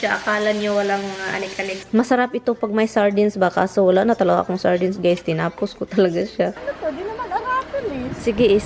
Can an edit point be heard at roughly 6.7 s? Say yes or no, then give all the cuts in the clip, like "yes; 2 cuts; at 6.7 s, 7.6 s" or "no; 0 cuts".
yes; 2 cuts; at 1.8 s, 6.7 s